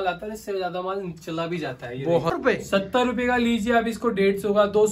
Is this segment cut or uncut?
cut